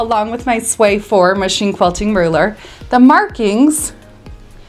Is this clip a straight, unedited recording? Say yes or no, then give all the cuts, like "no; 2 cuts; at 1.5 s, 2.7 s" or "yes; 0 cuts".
yes; 0 cuts